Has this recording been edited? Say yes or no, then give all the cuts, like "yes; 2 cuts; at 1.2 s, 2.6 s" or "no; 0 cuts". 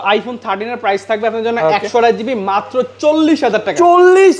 no; 0 cuts